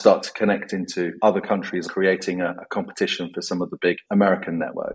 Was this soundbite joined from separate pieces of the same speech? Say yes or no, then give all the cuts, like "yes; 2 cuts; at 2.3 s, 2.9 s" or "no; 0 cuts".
yes; 3 cuts; at 1.1 s, 1.8 s, 4.0 s